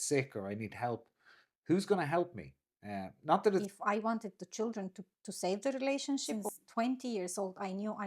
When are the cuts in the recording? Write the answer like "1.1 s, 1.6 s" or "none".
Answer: 3.7 s, 6.3 s